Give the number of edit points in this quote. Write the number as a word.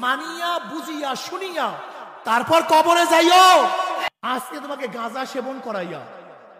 one